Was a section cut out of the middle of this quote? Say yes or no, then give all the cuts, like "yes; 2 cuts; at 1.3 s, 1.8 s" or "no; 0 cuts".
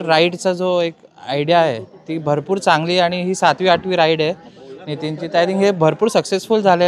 no; 0 cuts